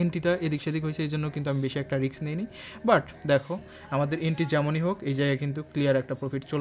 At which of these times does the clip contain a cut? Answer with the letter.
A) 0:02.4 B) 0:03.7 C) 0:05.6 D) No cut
D